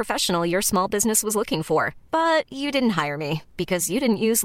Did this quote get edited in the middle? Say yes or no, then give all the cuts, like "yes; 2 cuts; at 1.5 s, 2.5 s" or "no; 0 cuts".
no; 0 cuts